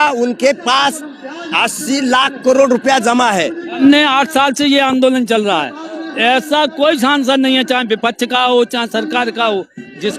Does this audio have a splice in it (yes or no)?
yes